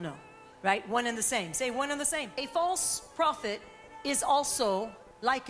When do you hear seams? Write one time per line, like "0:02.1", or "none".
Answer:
0:02.4